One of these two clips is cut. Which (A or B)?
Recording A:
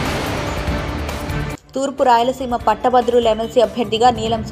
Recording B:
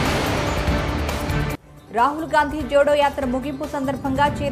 B